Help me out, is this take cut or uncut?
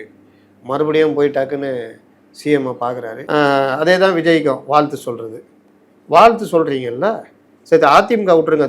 cut